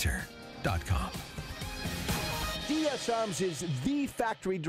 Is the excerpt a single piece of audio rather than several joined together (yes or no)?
no